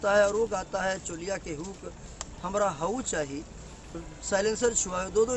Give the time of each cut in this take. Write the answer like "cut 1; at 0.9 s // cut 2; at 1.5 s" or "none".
cut 1; at 3.9 s